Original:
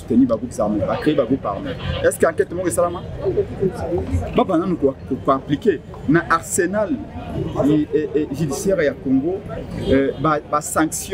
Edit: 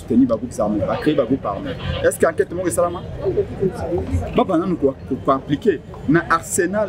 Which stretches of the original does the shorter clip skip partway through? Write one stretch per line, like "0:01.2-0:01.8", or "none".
none